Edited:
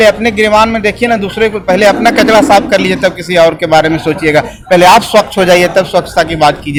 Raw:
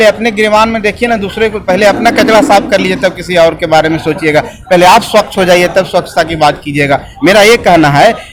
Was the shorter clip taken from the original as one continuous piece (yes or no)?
yes